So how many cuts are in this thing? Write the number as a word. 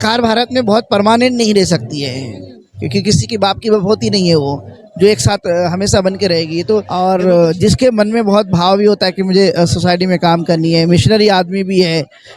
one